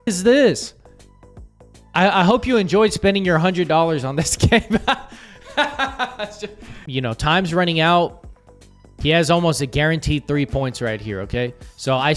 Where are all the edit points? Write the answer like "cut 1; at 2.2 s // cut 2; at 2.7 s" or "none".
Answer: cut 1; at 6.8 s